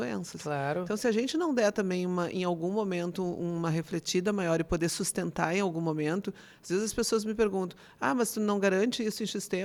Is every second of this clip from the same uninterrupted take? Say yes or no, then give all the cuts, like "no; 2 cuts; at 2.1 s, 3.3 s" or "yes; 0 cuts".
yes; 0 cuts